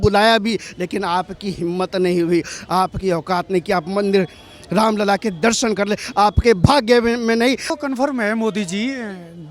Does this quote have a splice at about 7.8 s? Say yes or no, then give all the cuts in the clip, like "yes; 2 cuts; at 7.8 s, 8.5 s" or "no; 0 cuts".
yes; 1 cut; at 7.8 s